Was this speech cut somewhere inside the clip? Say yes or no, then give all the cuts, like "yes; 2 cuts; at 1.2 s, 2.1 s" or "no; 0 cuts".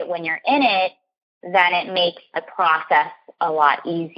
yes; 1 cut; at 2.4 s